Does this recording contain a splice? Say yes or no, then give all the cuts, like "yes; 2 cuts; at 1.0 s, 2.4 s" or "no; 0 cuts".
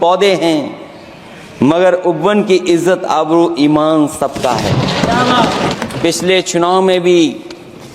yes; 1 cut; at 5.7 s